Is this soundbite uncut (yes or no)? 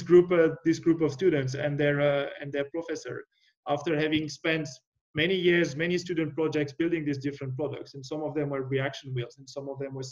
yes